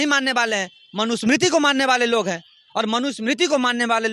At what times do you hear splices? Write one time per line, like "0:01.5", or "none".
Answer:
none

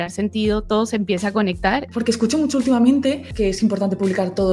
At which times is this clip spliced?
0:01.9
0:03.3

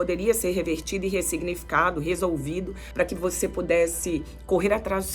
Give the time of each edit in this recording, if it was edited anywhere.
0:02.8

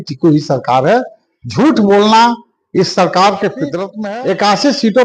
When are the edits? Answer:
0:03.9

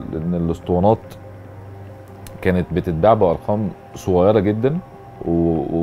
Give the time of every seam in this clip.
none

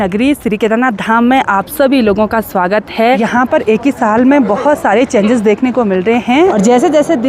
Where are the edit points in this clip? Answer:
0:03.2
0:06.5

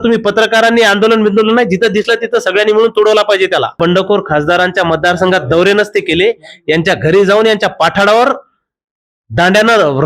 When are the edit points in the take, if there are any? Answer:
0:03.8

